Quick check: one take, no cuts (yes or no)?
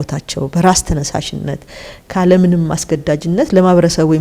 yes